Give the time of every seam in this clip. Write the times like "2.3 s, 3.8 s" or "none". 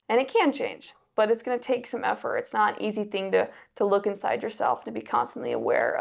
none